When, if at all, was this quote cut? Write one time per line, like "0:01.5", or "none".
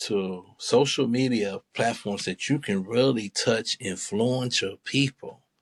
none